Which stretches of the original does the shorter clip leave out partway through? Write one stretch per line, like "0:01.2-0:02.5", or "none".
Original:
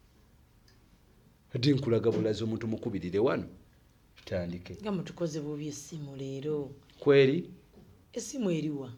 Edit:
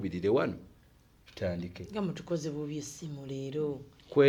none